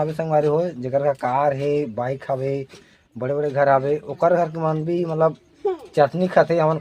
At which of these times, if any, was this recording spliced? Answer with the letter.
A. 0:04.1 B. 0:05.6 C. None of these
C